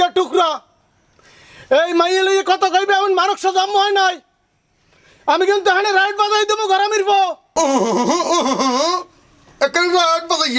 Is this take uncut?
yes; 0 cuts

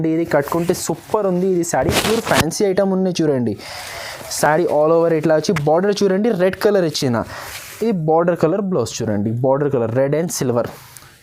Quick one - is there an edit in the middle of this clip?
no; 0 cuts

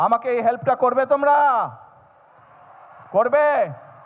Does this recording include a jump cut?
no; 0 cuts

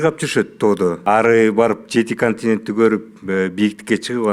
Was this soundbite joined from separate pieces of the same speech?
yes; 1 cut; at 1.0 s

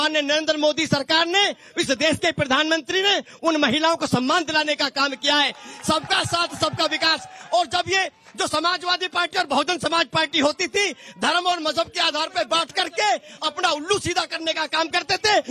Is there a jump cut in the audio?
yes; 1 cut; at 12.3 s

